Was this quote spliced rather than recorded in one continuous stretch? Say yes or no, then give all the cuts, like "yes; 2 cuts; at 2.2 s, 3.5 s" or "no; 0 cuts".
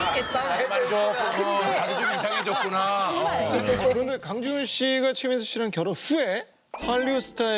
yes; 1 cut; at 3.5 s